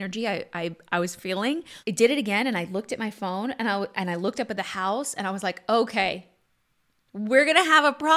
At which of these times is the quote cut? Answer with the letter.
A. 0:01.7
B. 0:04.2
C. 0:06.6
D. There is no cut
A